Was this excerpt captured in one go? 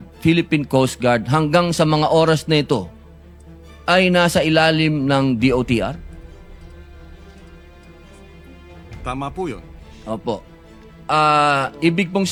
yes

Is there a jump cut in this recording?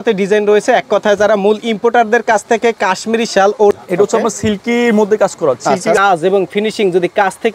yes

